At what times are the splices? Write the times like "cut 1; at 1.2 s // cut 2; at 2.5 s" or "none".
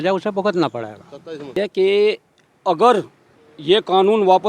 cut 1; at 1.6 s